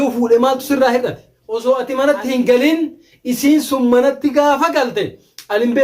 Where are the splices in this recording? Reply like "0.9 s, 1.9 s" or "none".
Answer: 1.6 s